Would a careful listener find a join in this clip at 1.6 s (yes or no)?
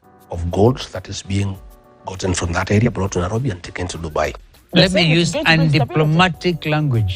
no